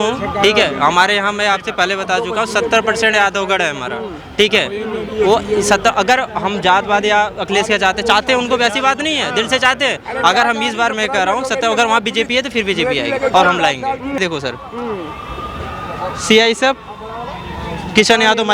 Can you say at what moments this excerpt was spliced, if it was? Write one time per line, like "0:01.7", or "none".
0:14.2